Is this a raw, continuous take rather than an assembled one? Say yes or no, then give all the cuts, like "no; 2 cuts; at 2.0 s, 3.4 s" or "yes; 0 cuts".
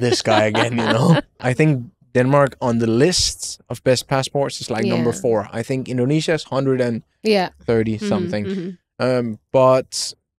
no; 1 cut; at 1.3 s